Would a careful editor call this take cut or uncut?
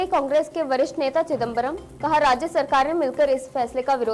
uncut